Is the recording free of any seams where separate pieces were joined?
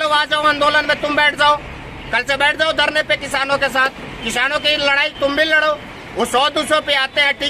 yes; 0 cuts

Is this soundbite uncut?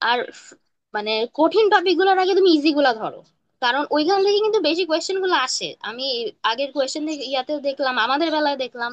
yes; 0 cuts

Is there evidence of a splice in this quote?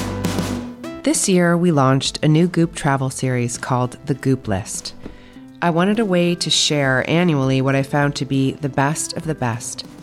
yes; 1 cut; at 1.0 s

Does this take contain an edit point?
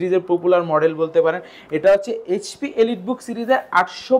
no; 0 cuts

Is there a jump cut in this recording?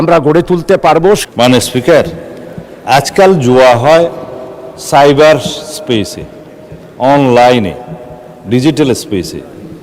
yes; 1 cut; at 1.2 s

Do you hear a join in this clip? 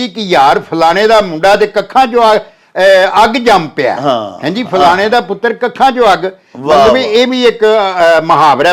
no; 0 cuts

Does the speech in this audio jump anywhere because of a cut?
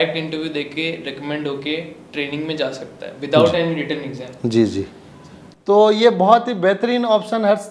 no; 0 cuts

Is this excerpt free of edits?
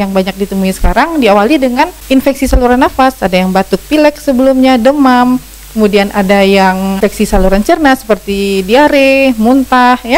no; 2 cuts; at 2.0 s, 7.0 s

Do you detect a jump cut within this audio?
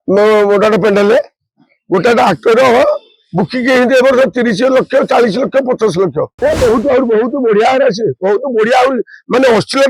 yes; 1 cut; at 6.4 s

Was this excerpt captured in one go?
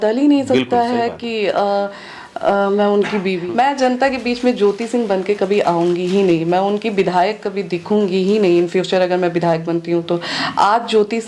no; 1 cut; at 3.4 s

